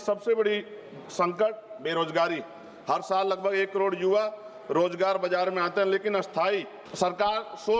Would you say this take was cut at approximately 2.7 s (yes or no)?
no